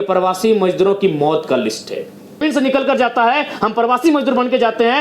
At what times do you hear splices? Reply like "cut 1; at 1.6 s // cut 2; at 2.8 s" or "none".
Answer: cut 1; at 2.4 s